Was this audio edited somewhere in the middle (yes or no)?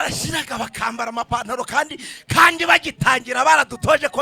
no